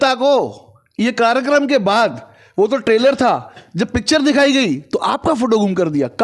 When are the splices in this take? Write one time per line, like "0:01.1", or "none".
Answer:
none